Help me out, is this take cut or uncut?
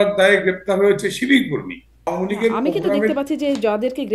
cut